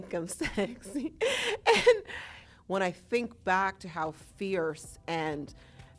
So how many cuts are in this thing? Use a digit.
1